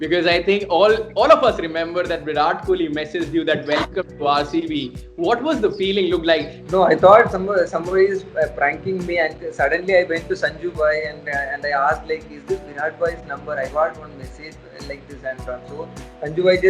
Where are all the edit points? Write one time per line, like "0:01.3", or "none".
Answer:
0:06.5